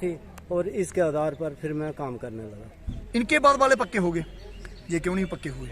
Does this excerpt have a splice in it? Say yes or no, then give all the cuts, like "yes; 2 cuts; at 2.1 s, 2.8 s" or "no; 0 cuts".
yes; 1 cut; at 2.9 s